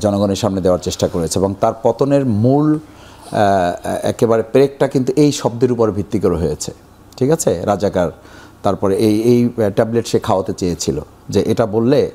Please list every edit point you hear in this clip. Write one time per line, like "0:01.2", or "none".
none